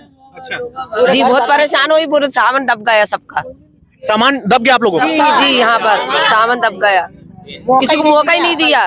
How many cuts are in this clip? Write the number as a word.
zero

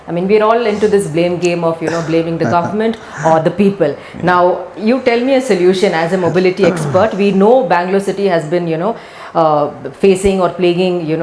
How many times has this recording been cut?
zero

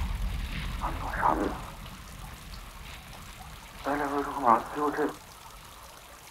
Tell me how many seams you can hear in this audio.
zero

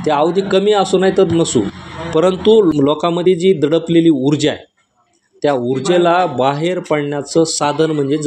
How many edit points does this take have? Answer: one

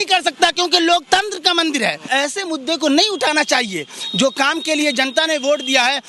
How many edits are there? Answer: one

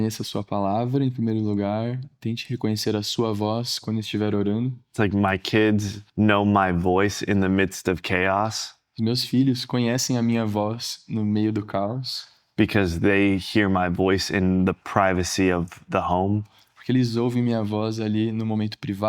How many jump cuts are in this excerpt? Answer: two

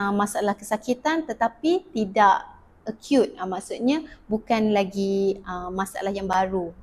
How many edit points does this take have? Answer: zero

